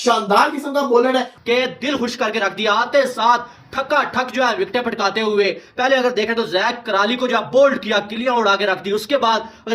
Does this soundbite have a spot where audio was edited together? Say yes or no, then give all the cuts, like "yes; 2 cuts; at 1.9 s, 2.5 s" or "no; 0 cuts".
yes; 1 cut; at 1.3 s